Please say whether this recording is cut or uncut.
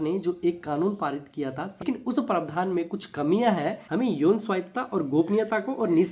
cut